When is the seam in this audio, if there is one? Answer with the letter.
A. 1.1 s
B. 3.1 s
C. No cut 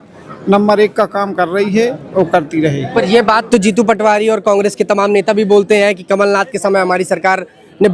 C